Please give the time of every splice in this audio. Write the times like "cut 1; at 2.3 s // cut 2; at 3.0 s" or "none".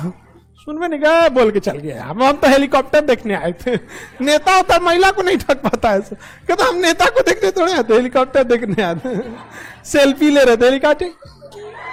none